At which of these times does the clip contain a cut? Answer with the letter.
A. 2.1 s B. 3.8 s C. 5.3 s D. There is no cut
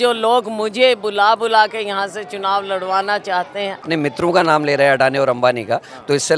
B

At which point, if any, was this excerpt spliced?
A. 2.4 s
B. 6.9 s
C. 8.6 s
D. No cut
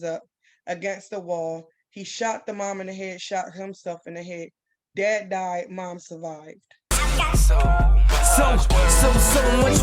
B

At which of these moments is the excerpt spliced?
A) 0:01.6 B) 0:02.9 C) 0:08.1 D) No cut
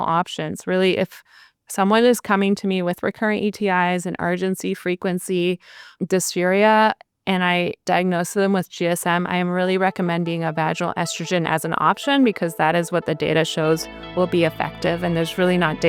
D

